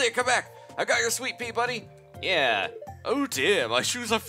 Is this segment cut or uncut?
uncut